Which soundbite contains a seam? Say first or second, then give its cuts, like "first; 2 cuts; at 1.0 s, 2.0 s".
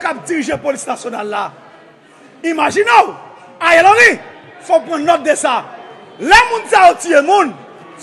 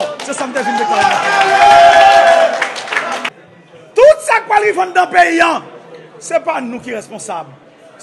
second; 1 cut; at 3.3 s